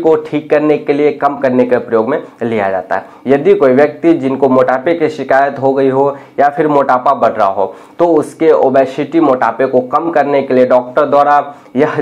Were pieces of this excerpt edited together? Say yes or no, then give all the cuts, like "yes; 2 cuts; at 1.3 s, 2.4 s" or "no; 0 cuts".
no; 0 cuts